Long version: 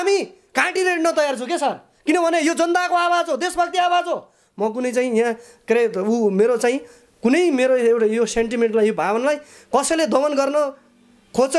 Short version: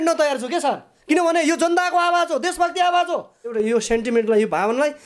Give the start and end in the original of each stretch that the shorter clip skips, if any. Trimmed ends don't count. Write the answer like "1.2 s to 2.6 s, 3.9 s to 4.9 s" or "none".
4.5 s to 8.0 s

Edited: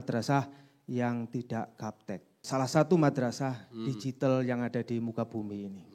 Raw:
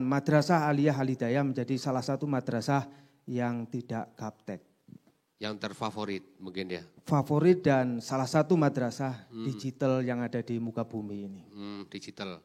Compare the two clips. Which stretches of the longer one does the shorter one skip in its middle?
4.8 s to 8.0 s

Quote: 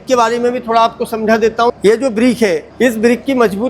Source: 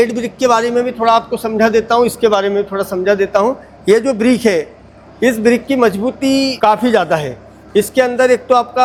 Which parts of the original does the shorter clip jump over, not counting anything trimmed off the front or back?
2.0 s to 3.7 s, 4.7 s to 5.1 s

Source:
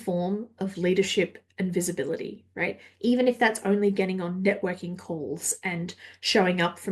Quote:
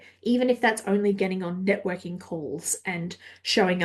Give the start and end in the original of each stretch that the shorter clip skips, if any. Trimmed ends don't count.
none

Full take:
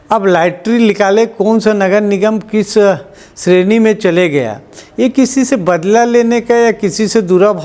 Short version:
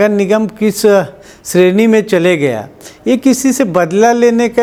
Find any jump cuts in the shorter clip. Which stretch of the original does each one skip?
none

